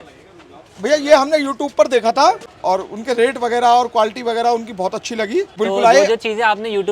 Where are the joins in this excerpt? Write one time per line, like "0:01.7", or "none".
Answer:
0:02.5
0:05.5